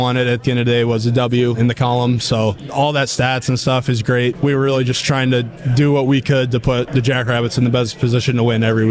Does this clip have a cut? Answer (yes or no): yes